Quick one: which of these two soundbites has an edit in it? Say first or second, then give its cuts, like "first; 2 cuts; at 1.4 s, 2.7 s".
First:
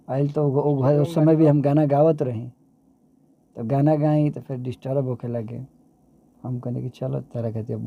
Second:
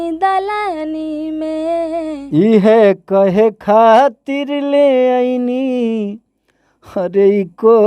second; 1 cut; at 2.2 s